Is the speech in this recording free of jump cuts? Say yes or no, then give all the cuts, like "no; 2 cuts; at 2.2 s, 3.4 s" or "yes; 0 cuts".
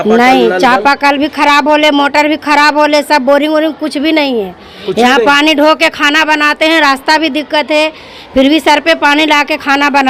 yes; 0 cuts